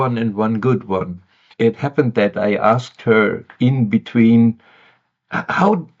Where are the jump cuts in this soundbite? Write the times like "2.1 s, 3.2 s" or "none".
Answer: 1.5 s